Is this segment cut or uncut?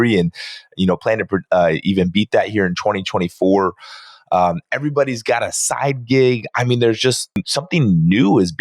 cut